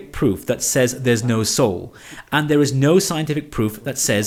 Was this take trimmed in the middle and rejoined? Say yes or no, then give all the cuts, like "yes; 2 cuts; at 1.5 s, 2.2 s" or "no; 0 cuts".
no; 0 cuts